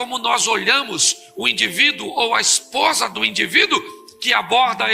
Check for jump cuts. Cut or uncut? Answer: uncut